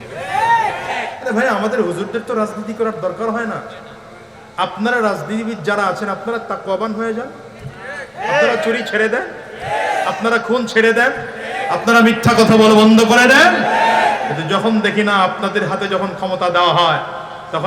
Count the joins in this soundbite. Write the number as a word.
one